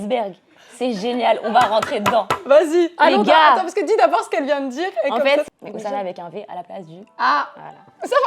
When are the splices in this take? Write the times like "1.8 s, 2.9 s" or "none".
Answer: 5.5 s